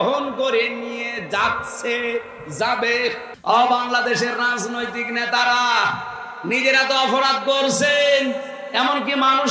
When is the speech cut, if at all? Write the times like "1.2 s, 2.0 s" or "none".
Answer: 3.3 s